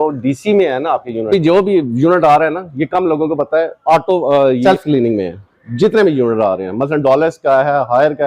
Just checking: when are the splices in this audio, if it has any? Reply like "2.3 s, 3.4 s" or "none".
1.3 s, 4.6 s